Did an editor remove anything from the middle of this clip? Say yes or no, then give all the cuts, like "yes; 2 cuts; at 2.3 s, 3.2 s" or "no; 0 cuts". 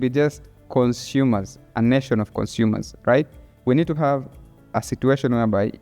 yes; 1 cut; at 3.4 s